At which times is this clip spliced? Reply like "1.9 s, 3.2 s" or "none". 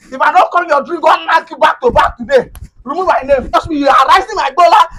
3.6 s